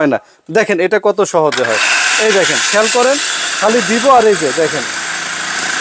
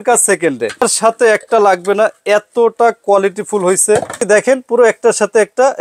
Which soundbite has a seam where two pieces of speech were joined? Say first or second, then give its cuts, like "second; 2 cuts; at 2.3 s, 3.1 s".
second; 2 cuts; at 0.8 s, 4.2 s